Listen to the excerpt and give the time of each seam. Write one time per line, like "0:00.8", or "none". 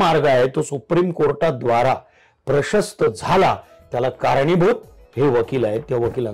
none